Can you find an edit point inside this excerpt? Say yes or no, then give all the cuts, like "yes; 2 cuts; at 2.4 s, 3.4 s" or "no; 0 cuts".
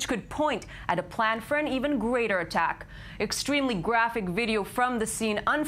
no; 0 cuts